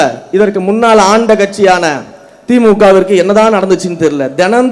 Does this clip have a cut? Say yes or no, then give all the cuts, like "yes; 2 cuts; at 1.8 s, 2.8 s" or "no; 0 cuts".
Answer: no; 0 cuts